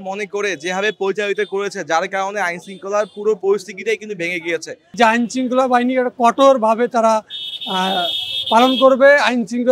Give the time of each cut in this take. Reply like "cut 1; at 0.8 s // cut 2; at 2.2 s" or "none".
cut 1; at 5.0 s